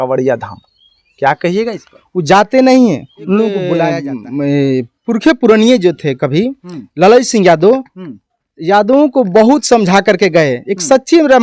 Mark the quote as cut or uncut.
cut